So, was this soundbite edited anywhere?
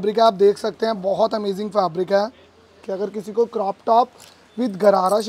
yes; 1 cut; at 2.9 s

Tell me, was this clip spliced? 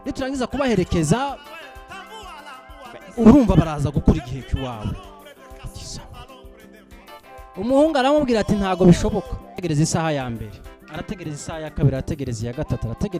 yes; 1 cut; at 9.6 s

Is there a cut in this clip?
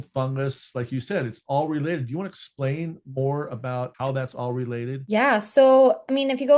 no; 0 cuts

